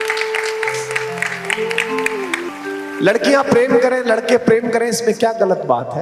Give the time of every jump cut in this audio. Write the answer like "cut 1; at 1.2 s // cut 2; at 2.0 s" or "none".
cut 1; at 2.5 s